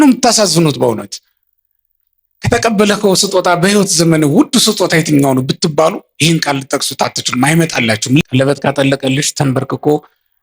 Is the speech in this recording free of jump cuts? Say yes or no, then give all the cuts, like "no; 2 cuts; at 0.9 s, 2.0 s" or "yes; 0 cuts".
no; 1 cut; at 8.2 s